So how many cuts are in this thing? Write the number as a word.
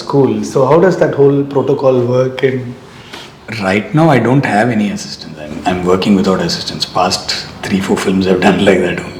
zero